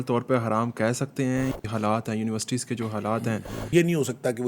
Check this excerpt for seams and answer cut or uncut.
cut